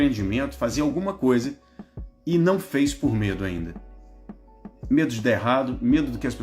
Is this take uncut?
yes; 0 cuts

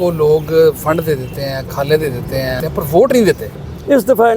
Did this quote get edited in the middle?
yes; 1 cut; at 2.6 s

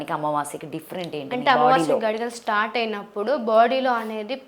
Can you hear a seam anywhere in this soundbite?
no; 0 cuts

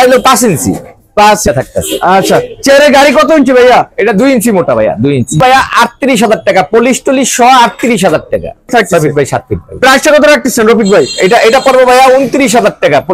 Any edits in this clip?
yes; 3 cuts; at 1.4 s, 5.4 s, 8.7 s

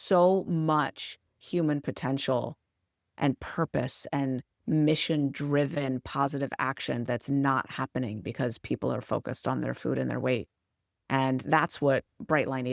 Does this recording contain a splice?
no; 0 cuts

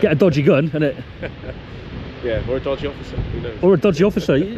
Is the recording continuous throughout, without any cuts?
yes; 0 cuts

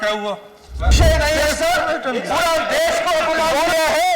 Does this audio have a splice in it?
yes; 1 cut; at 0.9 s

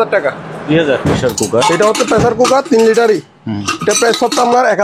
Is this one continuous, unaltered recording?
no; 1 cut; at 1.0 s

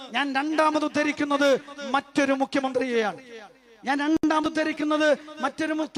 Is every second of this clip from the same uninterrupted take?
yes; 0 cuts

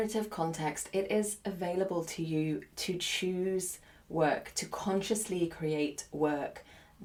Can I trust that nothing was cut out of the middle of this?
yes; 0 cuts

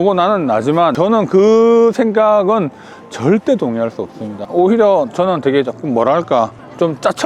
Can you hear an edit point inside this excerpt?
yes; 2 cuts; at 0.9 s, 4.4 s

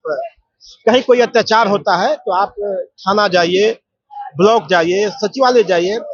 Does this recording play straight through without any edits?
yes; 0 cuts

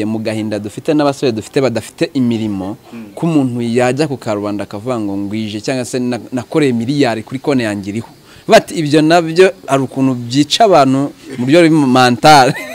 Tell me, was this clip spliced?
no; 0 cuts

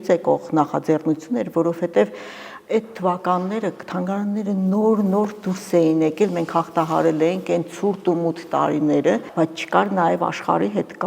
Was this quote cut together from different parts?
yes; 1 cut; at 9.3 s

